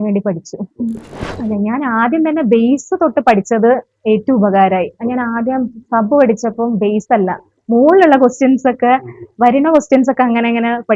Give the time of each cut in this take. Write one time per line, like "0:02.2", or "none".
0:01.2